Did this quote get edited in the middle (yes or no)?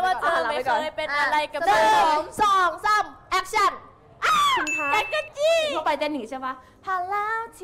yes